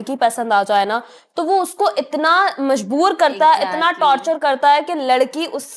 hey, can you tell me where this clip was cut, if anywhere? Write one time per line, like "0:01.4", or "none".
none